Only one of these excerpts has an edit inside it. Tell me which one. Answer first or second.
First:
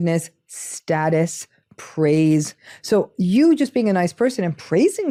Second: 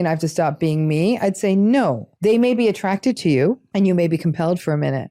second